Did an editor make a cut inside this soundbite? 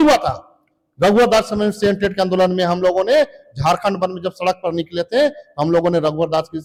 no; 0 cuts

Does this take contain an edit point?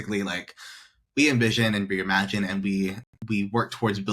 yes; 1 cut; at 3.1 s

